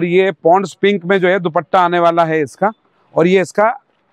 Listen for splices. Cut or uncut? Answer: uncut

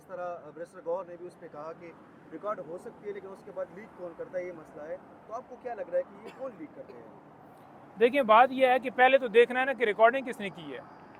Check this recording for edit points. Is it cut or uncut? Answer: uncut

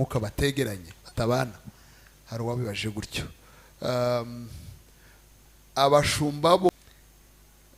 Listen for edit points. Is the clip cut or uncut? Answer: cut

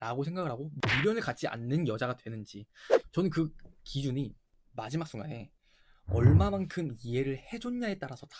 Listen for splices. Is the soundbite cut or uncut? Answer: cut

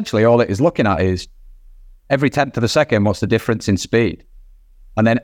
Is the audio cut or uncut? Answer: uncut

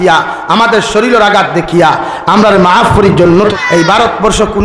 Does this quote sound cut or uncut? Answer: cut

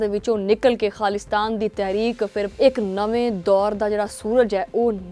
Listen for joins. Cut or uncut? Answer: cut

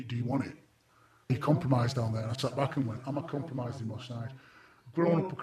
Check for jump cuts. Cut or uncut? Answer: cut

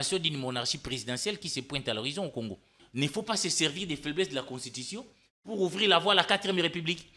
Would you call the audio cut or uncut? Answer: cut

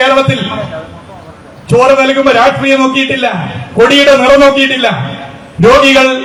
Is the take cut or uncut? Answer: uncut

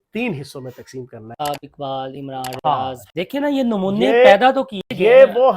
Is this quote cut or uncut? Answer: cut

